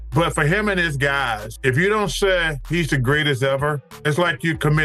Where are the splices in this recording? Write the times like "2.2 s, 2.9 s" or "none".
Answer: none